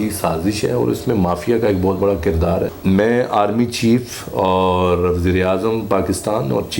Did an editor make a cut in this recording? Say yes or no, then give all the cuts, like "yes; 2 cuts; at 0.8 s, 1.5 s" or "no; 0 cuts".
yes; 1 cut; at 2.8 s